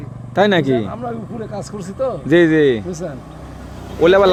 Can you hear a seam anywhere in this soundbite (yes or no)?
no